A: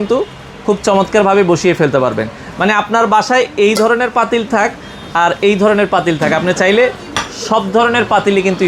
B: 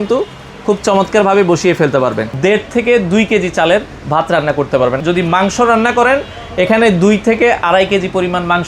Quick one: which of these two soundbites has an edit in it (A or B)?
B